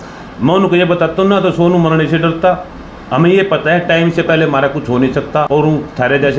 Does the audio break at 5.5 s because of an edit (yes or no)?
yes